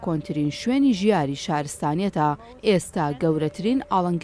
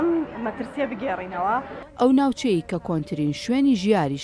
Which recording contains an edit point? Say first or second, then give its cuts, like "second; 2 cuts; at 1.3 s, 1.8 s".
second; 1 cut; at 1.8 s